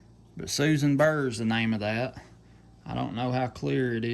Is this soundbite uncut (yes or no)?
yes